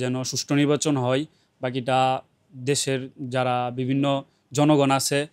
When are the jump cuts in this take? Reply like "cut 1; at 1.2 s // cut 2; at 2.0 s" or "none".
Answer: none